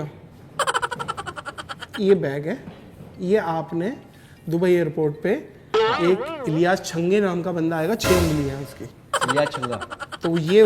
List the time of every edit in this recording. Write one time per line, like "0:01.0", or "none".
none